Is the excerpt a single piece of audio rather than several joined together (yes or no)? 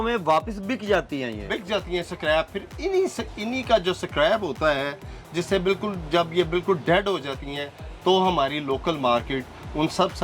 yes